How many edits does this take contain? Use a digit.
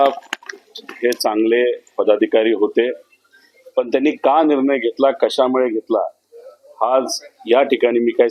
0